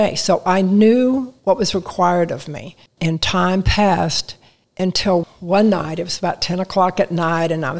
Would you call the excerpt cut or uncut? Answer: uncut